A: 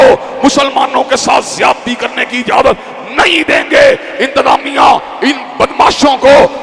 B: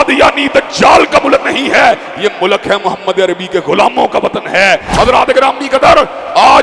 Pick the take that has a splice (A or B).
B